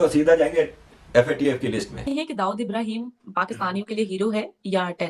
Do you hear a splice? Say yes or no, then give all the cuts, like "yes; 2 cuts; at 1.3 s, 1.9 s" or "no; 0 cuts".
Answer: yes; 1 cut; at 1.9 s